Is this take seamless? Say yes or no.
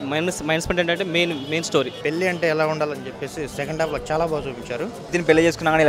no